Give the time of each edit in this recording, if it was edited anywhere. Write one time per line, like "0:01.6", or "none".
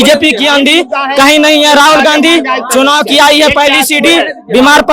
none